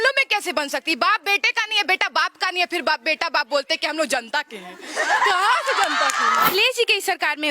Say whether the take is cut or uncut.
cut